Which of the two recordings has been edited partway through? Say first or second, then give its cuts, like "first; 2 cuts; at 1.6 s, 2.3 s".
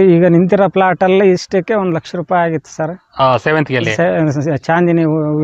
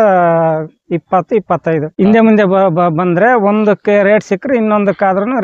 second; 1 cut; at 1.9 s